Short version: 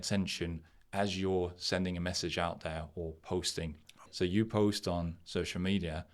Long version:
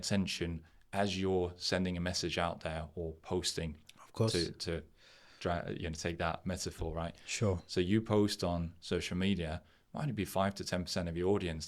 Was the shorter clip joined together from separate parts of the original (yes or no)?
yes